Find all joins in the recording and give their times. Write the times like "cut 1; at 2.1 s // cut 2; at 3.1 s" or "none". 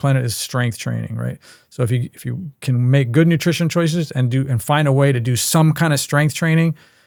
none